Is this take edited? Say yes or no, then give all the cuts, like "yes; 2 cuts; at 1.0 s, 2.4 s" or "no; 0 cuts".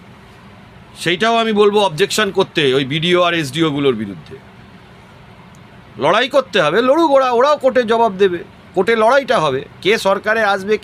no; 0 cuts